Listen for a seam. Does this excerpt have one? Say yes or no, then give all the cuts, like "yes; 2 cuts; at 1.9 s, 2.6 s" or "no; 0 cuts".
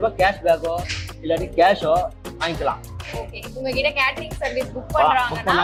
no; 0 cuts